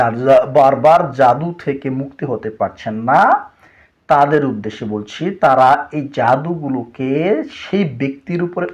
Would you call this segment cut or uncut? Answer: uncut